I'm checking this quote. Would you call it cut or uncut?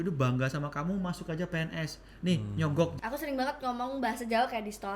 cut